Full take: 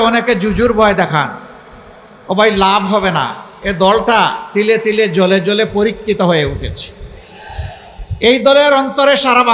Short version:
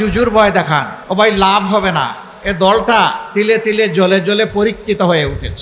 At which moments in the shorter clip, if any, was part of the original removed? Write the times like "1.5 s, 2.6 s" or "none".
1.0 s